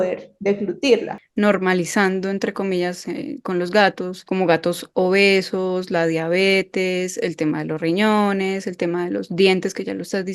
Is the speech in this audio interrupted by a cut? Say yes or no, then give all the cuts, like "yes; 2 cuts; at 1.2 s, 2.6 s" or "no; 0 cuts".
yes; 2 cuts; at 1.2 s, 4.1 s